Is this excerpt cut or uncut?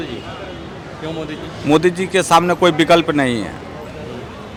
uncut